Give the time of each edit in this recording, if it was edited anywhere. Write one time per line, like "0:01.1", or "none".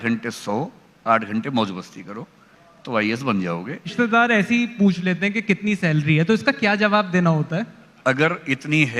0:03.9
0:07.8